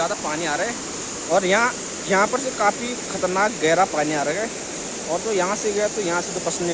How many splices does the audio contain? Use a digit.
0